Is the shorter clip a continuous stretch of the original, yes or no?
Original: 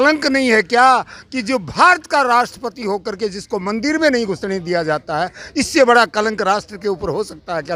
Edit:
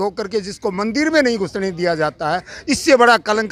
yes